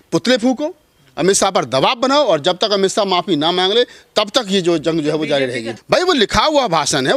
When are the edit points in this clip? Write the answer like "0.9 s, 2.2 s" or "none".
5.7 s